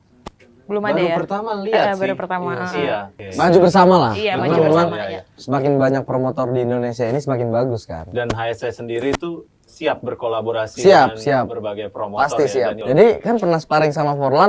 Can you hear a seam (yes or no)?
yes